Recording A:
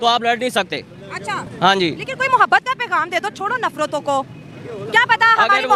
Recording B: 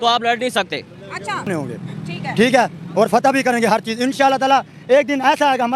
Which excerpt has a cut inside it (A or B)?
B